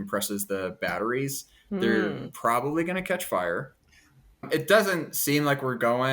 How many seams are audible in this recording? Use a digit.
1